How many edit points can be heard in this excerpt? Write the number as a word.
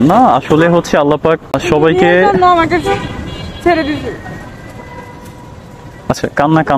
one